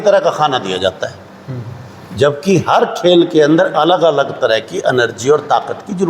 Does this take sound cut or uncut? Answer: uncut